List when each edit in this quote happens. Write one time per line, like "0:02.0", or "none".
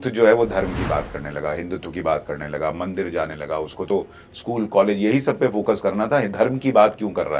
none